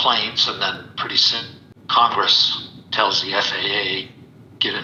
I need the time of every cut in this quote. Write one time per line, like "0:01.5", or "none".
none